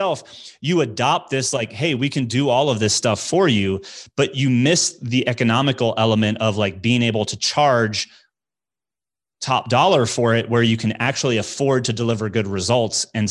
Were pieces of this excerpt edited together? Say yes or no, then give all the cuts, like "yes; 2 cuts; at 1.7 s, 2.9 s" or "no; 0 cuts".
no; 0 cuts